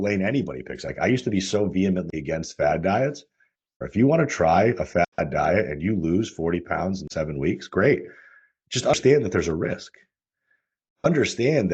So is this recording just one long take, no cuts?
no; 2 cuts; at 0.9 s, 3.7 s

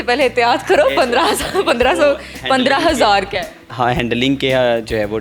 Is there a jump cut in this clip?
no; 0 cuts

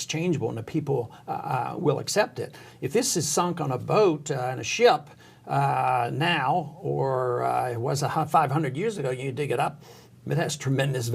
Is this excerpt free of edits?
yes; 0 cuts

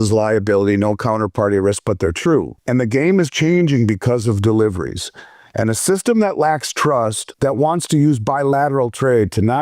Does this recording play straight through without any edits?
no; 2 cuts; at 2.6 s, 7.2 s

